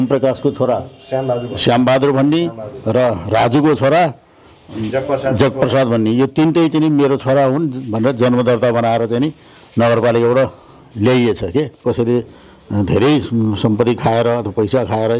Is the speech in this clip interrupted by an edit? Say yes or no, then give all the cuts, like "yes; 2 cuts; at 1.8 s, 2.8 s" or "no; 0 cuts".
yes; 1 cut; at 11.8 s